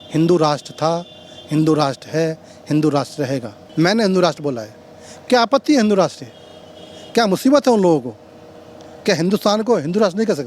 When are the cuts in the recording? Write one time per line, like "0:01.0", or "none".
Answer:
0:03.6